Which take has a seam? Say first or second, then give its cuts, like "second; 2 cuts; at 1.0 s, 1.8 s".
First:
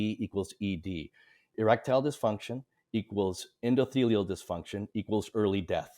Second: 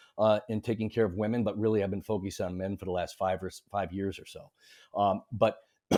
first; 1 cut; at 1.5 s